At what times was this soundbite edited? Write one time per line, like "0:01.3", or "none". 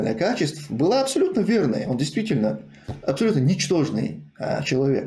none